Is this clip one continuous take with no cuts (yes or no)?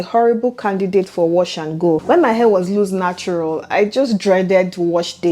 yes